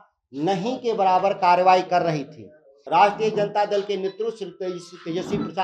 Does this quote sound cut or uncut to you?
cut